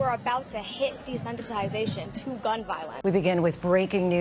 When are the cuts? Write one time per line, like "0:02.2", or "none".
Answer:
0:02.8